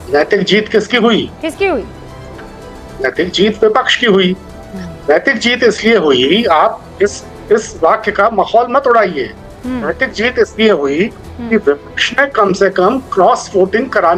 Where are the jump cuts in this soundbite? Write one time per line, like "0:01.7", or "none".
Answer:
none